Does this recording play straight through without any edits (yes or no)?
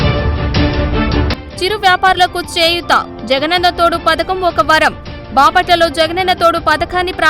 no